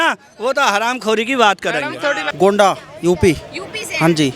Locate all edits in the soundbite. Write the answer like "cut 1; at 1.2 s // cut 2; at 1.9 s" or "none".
cut 1; at 2.3 s